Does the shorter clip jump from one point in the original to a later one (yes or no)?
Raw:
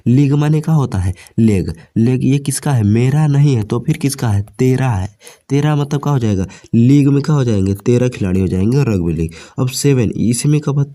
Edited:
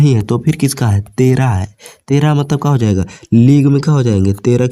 no